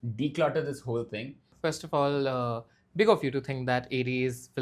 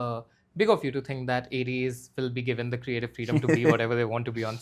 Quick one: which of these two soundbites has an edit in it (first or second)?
first